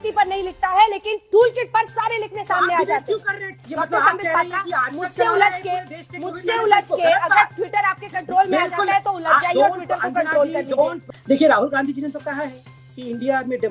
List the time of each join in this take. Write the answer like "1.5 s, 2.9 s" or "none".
3.6 s, 11.1 s